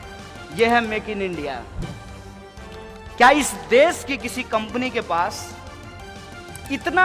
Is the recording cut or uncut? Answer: uncut